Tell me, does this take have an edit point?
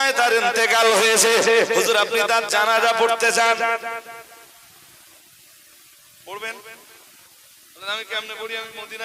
no; 0 cuts

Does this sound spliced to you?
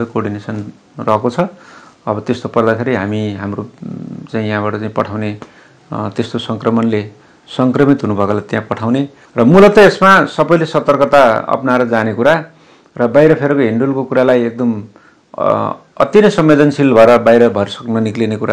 no; 0 cuts

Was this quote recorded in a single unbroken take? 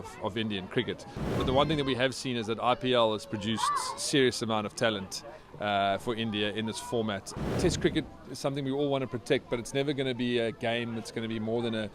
no; 2 cuts; at 1.3 s, 7.4 s

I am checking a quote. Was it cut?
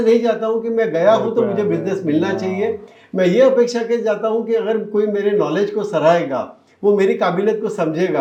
no; 0 cuts

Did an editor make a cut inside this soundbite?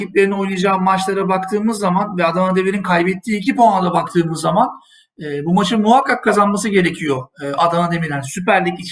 no; 0 cuts

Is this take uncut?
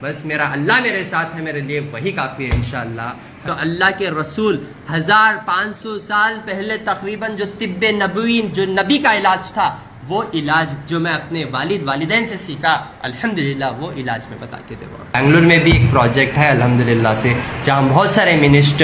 no; 3 cuts; at 3.4 s, 13.0 s, 15.2 s

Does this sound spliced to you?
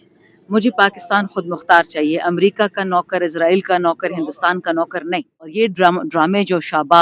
yes; 1 cut; at 5.5 s

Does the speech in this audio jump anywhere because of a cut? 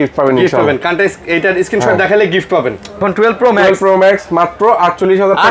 yes; 1 cut; at 3.0 s

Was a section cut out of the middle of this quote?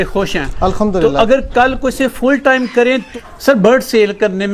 yes; 1 cut; at 3.1 s

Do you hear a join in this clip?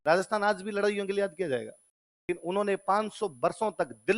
yes; 1 cut; at 2.3 s

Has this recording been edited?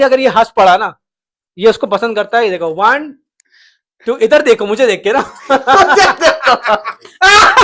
no; 0 cuts

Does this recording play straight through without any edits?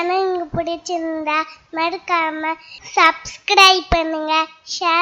yes; 0 cuts

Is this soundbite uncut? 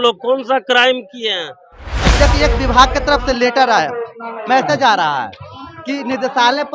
no; 1 cut; at 2.0 s

